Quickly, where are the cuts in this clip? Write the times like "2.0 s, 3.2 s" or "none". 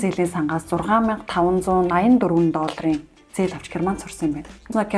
none